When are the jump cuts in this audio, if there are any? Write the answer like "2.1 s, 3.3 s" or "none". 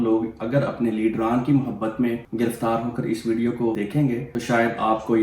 2.2 s, 3.9 s